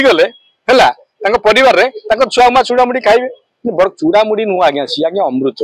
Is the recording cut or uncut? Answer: uncut